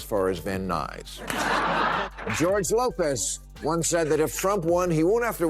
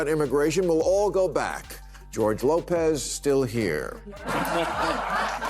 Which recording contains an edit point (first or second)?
first